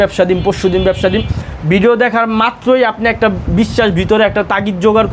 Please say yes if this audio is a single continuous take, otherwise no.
yes